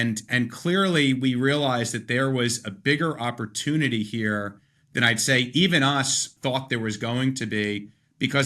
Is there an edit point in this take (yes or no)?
yes